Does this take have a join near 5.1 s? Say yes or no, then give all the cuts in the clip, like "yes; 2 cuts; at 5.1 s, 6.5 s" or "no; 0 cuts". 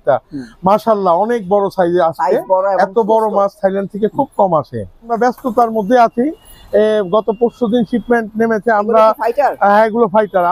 yes; 1 cut; at 5.1 s